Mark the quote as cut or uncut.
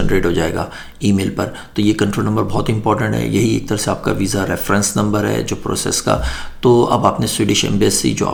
uncut